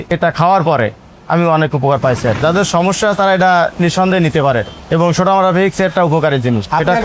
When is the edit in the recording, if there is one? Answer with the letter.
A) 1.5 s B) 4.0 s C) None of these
C